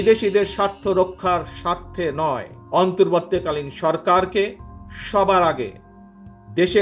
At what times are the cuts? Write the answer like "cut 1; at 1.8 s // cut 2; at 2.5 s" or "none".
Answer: cut 1; at 2.5 s